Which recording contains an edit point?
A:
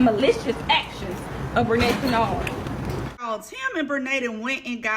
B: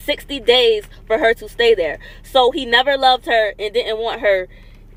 A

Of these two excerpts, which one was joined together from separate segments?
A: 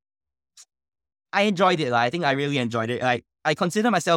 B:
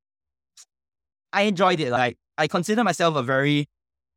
B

